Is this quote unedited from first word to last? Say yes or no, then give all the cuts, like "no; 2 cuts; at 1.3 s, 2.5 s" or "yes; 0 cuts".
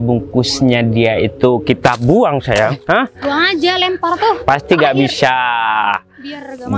yes; 0 cuts